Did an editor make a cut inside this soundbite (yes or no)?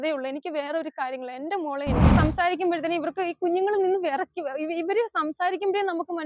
yes